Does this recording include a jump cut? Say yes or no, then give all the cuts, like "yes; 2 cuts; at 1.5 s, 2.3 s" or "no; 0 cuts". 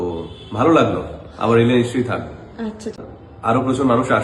yes; 1 cut; at 3.0 s